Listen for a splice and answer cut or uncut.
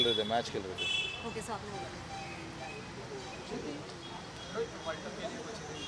uncut